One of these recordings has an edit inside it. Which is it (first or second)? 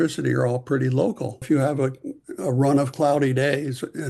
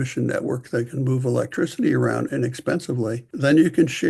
first